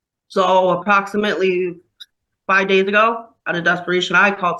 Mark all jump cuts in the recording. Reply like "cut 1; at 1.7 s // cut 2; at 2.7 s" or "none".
none